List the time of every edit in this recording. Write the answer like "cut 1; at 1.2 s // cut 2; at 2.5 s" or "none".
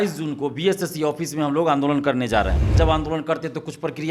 cut 1; at 2.7 s

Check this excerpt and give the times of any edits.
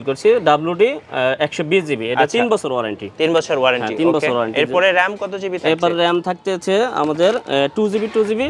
none

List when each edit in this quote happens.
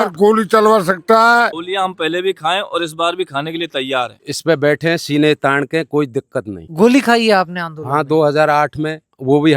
cut 1; at 1.5 s // cut 2; at 4.2 s // cut 3; at 6.7 s

